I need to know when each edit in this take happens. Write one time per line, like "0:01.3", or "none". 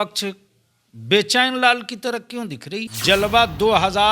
0:02.9